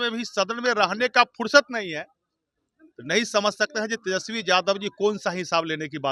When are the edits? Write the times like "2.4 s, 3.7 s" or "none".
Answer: none